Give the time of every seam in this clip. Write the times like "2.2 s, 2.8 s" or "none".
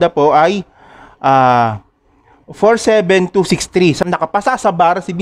4.0 s

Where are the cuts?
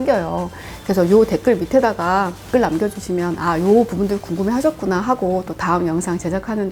none

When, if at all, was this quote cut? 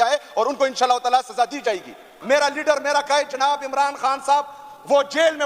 2.1 s

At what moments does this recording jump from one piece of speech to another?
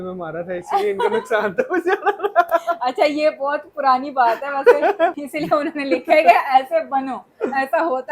5.2 s

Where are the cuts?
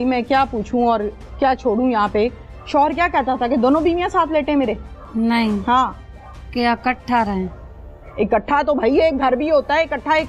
none

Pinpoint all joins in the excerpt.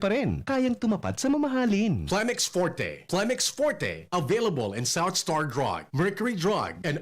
2.0 s

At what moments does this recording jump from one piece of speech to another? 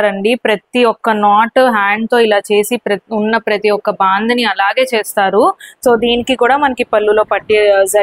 5.7 s

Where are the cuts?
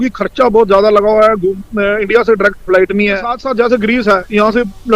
3.4 s

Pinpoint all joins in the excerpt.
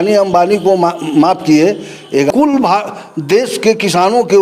2.3 s

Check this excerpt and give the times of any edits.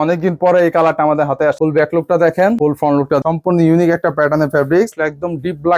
1.6 s, 3.2 s, 4.9 s

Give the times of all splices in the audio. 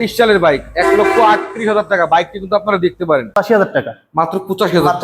3.3 s

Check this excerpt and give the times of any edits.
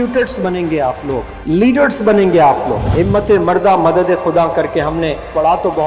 1.3 s, 2.8 s

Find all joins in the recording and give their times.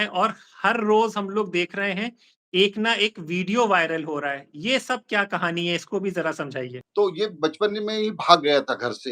6.8 s

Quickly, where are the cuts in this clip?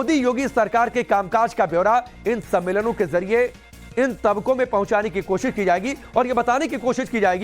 2.7 s

